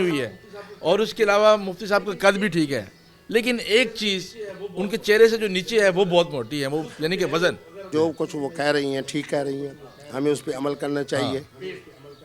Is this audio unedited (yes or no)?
no